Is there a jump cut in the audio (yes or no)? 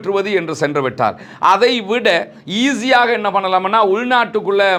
no